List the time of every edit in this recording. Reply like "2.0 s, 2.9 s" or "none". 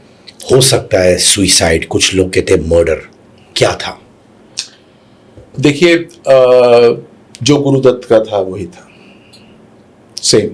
none